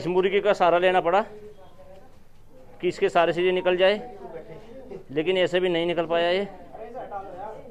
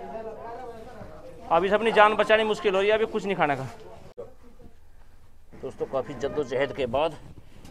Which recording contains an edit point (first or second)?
second